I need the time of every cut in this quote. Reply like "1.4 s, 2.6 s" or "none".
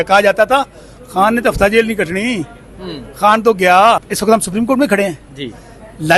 4.1 s